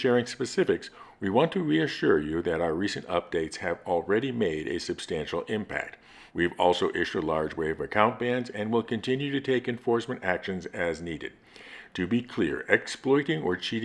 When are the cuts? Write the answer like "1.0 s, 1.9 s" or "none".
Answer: 6.2 s, 11.4 s